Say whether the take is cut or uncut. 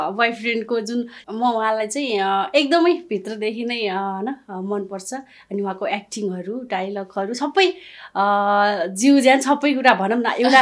cut